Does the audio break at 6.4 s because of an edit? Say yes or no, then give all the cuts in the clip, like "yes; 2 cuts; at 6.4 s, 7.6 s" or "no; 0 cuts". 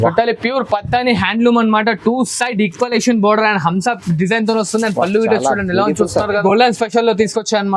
yes; 1 cut; at 6.4 s